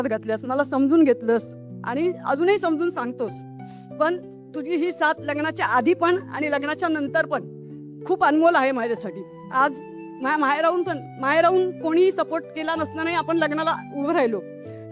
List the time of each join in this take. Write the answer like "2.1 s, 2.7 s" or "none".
none